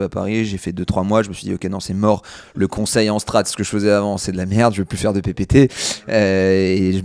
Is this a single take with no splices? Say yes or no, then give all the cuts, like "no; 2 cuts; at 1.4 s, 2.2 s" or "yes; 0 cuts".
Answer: yes; 0 cuts